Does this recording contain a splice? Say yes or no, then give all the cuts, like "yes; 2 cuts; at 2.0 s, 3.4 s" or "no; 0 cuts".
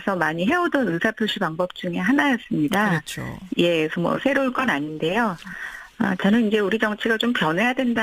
no; 0 cuts